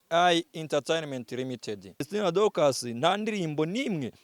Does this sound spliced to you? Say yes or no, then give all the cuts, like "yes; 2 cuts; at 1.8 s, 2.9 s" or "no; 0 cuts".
yes; 1 cut; at 2.1 s